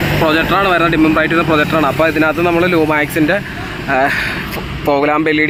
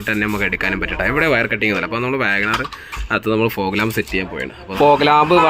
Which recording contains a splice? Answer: second; 1 cut; at 4.6 s

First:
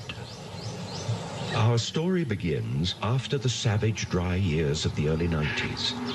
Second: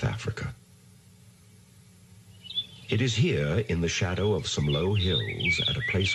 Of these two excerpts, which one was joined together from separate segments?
first; 1 cut; at 3.6 s

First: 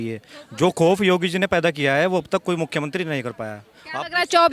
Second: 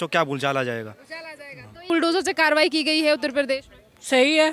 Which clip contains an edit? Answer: second; 1 cut; at 1.9 s

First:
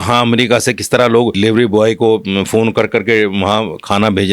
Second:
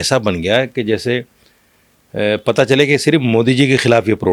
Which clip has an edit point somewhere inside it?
first; 1 cut; at 1.3 s

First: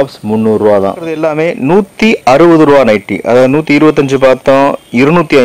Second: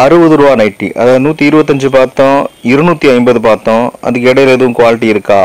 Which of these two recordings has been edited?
first; 1 cut; at 1.2 s

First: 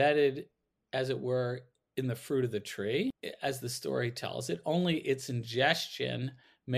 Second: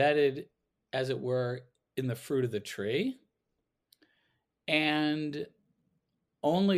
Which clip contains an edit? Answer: first; 1 cut; at 3.2 s

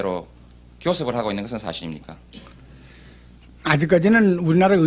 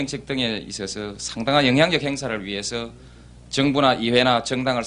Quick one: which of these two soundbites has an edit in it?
second; 1 cut; at 2.0 s

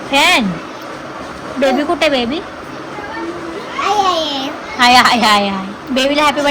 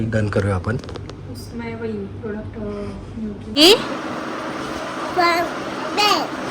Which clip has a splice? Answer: second; 1 cut; at 3.6 s

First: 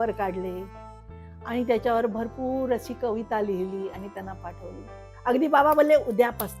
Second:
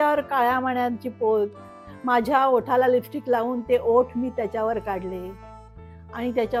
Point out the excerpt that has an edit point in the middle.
first; 1 cut; at 5.0 s

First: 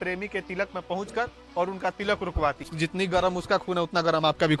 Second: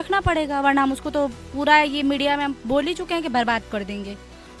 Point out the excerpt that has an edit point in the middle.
first; 1 cut; at 2.7 s

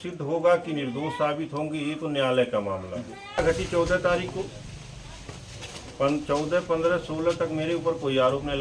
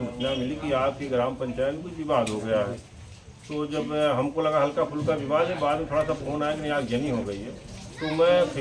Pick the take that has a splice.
first; 1 cut; at 3.4 s

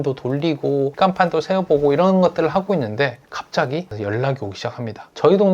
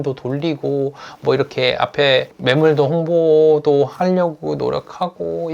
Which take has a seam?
first; 2 cuts; at 0.9 s, 3.9 s

